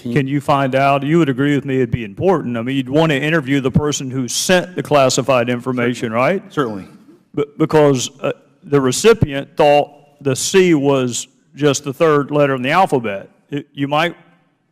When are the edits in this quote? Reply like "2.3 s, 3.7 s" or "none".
8.5 s